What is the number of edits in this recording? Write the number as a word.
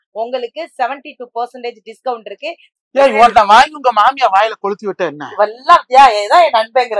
one